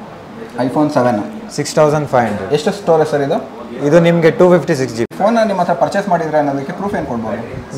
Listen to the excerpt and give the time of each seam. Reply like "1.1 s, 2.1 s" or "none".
5.1 s